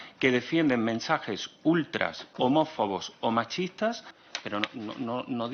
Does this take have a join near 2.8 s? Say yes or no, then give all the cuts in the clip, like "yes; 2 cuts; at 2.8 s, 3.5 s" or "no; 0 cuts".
no; 1 cut; at 4.2 s